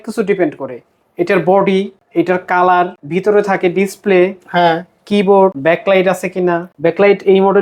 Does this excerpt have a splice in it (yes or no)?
yes